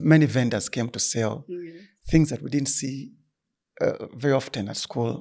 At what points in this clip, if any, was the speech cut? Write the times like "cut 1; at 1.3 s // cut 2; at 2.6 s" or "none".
none